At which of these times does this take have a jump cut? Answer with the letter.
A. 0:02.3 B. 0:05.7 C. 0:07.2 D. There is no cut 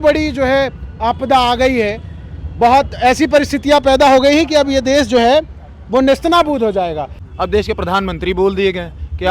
C